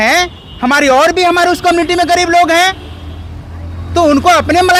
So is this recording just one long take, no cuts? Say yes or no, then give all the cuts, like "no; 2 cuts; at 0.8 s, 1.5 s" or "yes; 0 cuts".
yes; 0 cuts